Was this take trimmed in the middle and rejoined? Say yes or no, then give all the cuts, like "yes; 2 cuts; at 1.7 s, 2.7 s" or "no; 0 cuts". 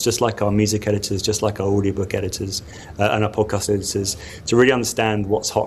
no; 0 cuts